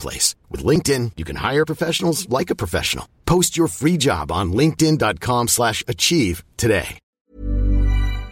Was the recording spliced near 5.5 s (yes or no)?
no